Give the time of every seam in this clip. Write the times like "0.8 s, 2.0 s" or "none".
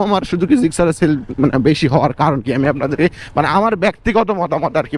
none